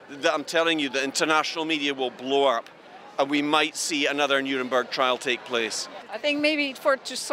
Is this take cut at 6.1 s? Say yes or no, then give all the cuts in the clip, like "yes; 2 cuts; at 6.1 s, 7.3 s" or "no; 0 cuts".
yes; 1 cut; at 6.1 s